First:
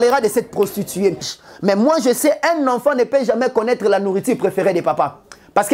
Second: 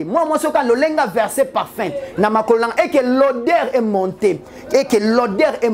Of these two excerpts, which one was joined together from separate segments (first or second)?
first